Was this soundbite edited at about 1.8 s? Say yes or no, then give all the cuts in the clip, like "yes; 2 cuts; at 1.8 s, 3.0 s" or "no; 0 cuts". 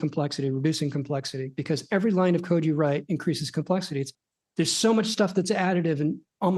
no; 1 cut; at 4.1 s